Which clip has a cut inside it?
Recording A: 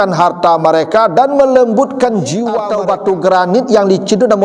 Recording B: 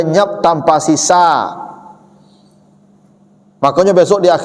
A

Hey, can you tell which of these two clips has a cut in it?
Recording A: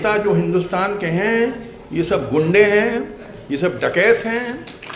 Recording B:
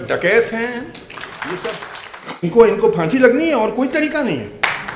B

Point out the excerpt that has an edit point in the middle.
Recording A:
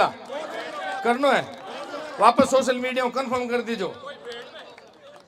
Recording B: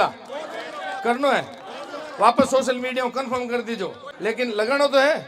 B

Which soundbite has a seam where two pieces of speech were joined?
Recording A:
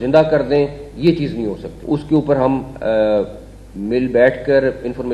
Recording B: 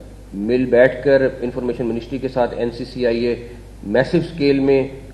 A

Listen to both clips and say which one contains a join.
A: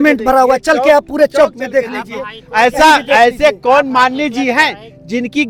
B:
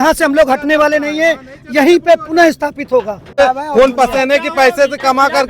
B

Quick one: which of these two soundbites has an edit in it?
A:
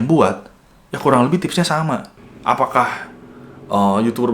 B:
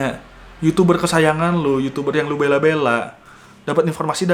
A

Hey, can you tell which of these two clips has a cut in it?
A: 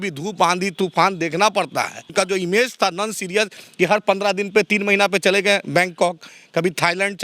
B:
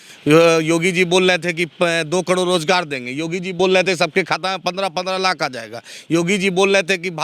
A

